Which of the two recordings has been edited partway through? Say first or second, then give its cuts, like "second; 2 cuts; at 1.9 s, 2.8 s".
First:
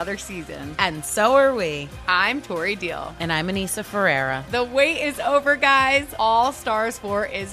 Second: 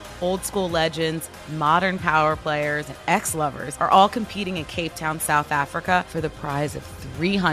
second; 2 cuts; at 3.3 s, 6.1 s